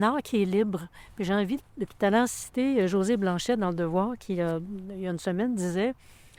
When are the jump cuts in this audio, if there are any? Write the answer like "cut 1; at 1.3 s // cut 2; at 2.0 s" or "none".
none